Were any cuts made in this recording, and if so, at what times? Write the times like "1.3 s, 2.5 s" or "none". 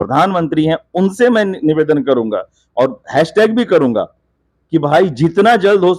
none